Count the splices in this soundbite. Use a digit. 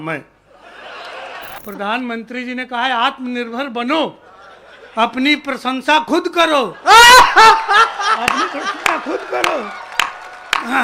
1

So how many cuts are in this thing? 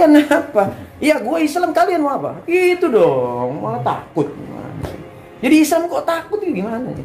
0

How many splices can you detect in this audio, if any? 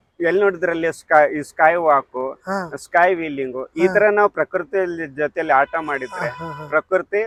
0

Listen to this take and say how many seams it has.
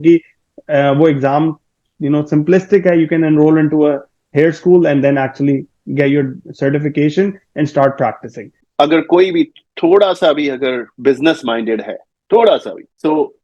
1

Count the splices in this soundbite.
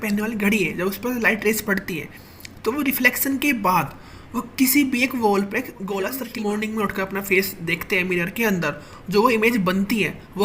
1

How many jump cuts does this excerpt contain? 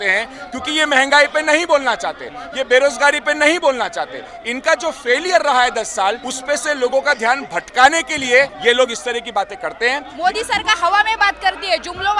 3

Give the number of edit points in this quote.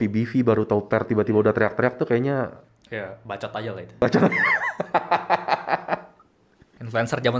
0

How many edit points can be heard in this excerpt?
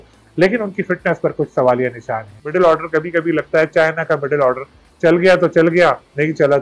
1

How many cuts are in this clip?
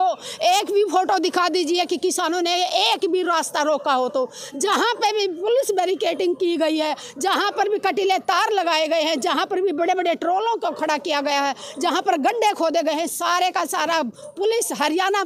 0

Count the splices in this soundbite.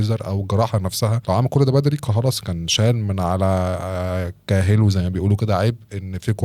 1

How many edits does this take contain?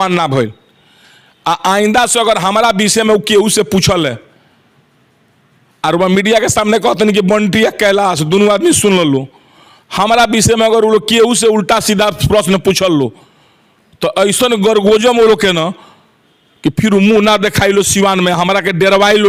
0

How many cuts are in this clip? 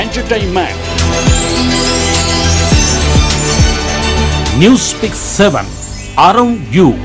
0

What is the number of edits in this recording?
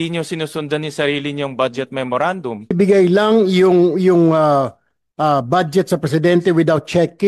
1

